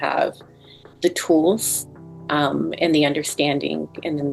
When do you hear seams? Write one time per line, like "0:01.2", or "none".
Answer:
none